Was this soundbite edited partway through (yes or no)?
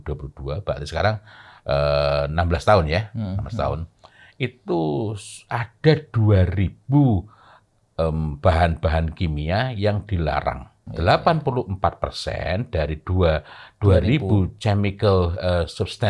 yes